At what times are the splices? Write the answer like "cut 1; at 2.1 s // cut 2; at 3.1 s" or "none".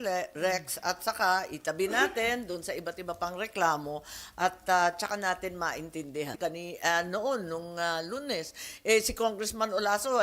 cut 1; at 6.3 s